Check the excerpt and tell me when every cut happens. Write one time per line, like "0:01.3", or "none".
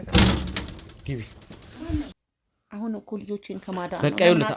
0:02.1